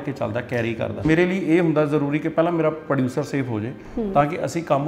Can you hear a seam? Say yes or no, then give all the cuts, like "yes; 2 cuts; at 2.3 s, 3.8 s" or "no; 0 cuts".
yes; 1 cut; at 1.0 s